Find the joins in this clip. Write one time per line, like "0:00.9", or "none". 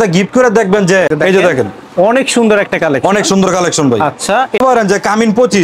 0:01.1
0:04.6